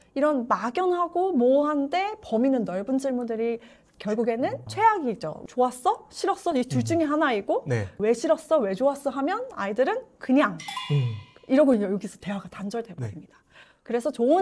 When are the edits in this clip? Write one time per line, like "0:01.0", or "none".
0:05.4
0:08.0